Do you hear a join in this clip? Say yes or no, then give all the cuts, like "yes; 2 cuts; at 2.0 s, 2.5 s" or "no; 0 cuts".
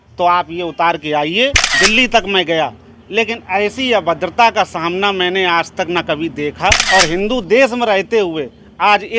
yes; 2 cuts; at 1.6 s, 6.8 s